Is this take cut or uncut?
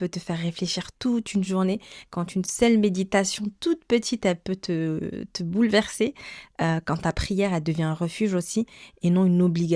uncut